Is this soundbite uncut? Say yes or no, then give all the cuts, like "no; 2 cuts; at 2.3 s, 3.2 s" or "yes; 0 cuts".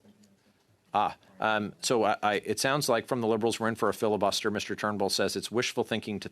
yes; 0 cuts